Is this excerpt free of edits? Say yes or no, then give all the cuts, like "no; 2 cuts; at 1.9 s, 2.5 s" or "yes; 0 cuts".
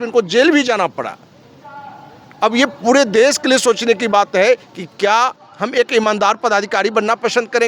yes; 0 cuts